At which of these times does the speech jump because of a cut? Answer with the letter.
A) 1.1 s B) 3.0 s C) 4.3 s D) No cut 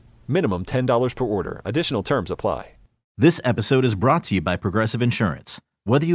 B